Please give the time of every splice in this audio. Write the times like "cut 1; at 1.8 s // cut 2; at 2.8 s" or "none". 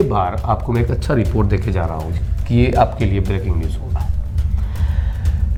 none